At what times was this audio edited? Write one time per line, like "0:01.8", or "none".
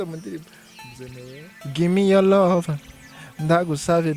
0:01.5